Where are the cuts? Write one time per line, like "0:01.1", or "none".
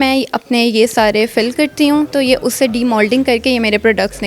0:02.1